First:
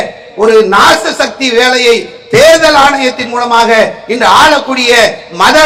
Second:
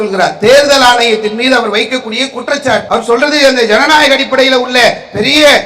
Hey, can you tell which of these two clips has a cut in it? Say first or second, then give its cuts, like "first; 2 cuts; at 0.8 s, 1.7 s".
second; 1 cut; at 2.8 s